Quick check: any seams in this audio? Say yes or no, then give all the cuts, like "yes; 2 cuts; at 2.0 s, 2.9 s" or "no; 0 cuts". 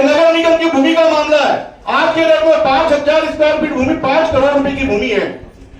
no; 0 cuts